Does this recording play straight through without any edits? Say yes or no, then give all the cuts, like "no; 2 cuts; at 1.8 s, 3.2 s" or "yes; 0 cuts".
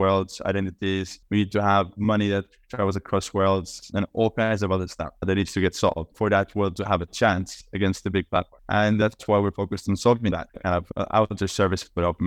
no; 2 cuts; at 9.0 s, 10.6 s